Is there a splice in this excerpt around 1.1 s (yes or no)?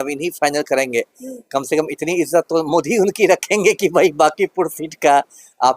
no